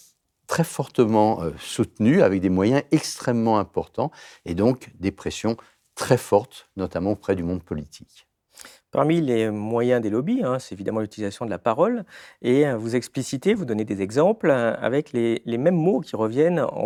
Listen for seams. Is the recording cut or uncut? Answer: uncut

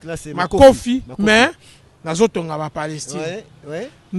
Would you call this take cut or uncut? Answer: uncut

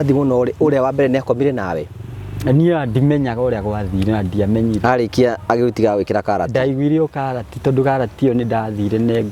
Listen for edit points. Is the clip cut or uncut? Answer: uncut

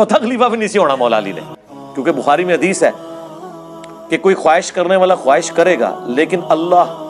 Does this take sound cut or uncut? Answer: uncut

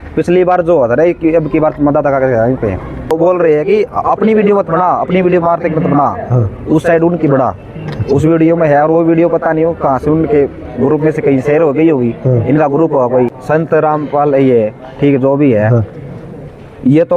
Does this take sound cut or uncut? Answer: cut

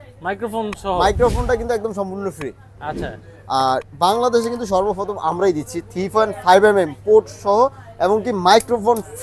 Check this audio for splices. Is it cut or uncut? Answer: uncut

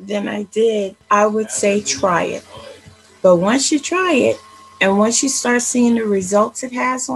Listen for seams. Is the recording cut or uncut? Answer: cut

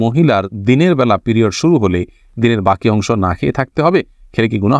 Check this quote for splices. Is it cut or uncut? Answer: uncut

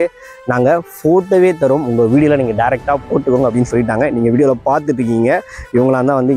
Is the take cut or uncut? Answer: uncut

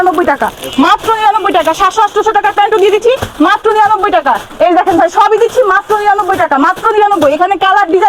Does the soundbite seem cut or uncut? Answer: uncut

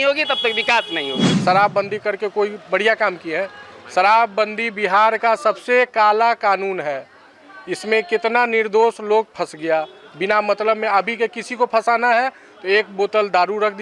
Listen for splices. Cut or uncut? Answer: cut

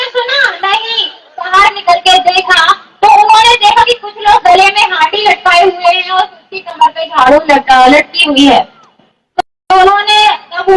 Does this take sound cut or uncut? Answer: cut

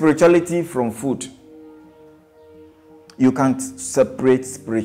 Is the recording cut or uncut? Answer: uncut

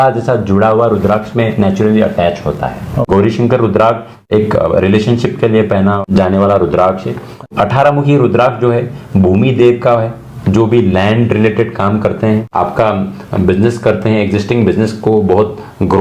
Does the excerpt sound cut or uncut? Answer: cut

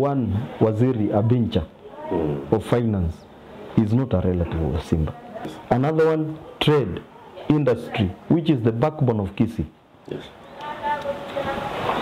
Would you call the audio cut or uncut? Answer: cut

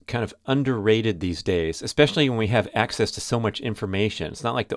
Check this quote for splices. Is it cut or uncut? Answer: uncut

